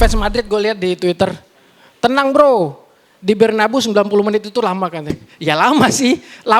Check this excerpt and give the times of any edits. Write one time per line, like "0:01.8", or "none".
0:05.3

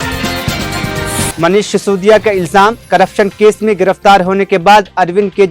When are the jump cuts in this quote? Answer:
0:01.3

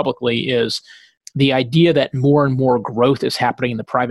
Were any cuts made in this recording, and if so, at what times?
0:01.2

